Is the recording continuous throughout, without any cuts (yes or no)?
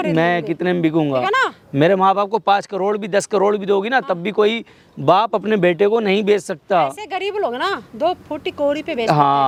yes